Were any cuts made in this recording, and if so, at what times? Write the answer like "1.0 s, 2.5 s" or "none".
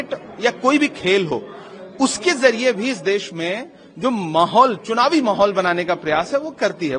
none